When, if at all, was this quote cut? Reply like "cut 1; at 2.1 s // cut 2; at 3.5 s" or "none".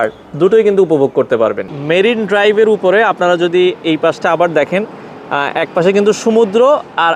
none